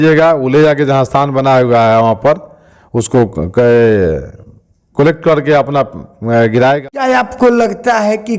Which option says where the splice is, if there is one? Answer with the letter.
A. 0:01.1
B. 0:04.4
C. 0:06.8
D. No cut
C